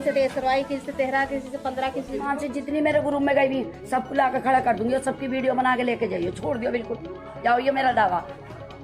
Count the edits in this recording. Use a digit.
1